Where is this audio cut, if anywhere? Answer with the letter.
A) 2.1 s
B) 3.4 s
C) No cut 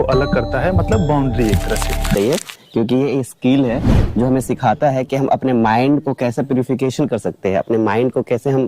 A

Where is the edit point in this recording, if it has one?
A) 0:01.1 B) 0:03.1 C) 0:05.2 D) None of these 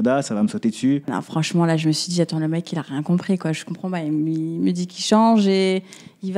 A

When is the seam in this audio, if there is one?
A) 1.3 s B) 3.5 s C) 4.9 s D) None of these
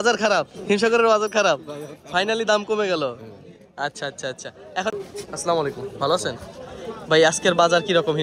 C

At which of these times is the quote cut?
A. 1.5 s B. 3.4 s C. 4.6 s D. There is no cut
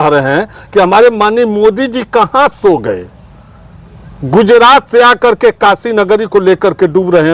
D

